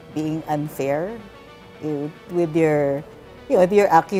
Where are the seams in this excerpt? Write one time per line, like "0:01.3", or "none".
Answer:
none